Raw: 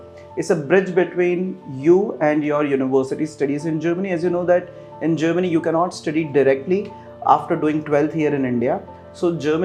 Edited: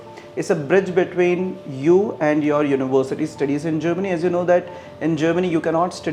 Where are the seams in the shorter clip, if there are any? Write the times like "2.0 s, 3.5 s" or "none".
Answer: none